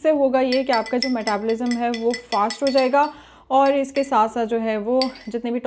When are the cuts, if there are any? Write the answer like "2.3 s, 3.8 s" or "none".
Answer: none